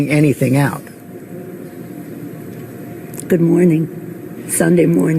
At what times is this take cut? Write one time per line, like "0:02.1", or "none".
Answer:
0:01.0